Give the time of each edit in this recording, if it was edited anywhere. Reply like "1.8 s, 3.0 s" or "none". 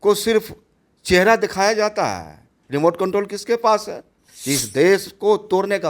4.3 s